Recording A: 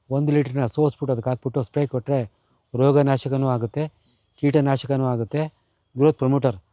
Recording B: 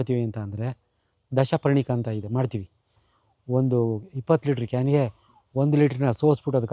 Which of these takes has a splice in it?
B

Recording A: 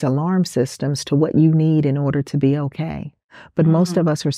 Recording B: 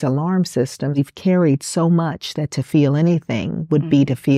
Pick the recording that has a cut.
B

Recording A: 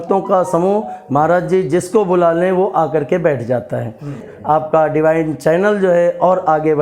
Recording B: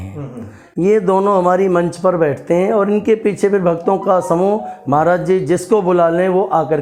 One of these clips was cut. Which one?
A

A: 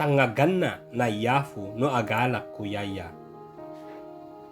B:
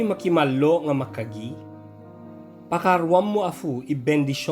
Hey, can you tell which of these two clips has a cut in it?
A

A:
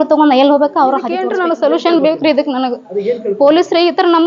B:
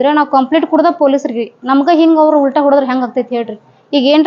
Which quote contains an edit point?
A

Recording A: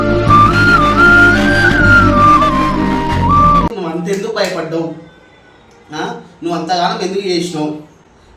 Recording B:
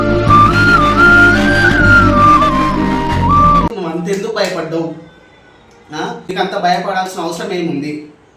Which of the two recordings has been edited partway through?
B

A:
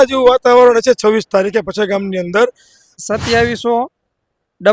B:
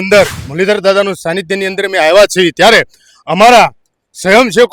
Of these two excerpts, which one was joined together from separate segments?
A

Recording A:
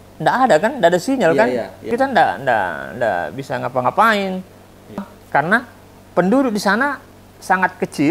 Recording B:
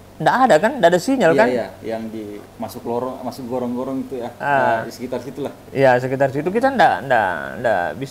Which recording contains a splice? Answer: A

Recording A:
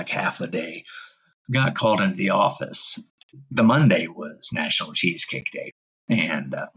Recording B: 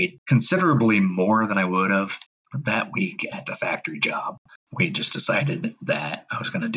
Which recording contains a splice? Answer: B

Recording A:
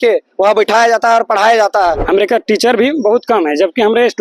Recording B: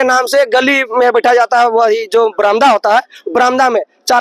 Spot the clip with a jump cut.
A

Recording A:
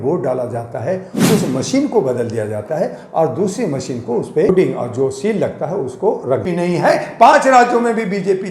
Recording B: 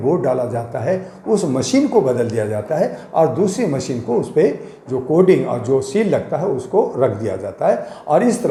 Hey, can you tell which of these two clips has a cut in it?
A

